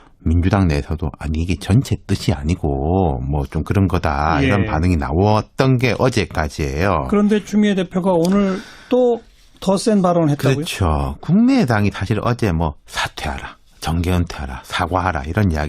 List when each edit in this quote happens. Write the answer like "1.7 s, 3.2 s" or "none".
14.2 s